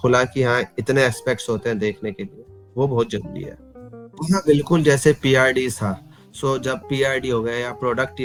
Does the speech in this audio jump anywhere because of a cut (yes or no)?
no